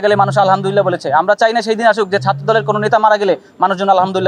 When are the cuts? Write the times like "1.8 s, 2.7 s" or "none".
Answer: none